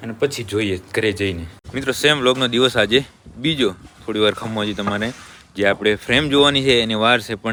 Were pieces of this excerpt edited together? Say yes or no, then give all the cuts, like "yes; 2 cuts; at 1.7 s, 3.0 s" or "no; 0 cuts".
no; 0 cuts